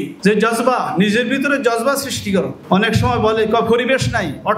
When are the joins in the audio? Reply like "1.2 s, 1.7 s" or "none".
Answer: none